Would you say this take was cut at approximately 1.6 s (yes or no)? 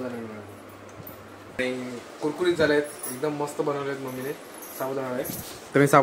yes